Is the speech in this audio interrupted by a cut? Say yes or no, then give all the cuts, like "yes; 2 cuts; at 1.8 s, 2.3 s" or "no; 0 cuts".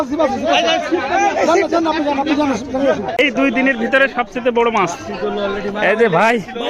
yes; 1 cut; at 3.2 s